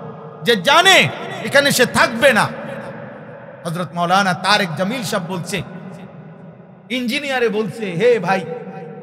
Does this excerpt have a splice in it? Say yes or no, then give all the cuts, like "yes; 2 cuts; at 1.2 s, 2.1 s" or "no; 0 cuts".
no; 0 cuts